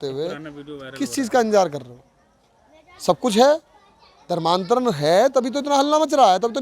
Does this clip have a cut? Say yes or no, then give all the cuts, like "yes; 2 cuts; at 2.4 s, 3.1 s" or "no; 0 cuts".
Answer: no; 0 cuts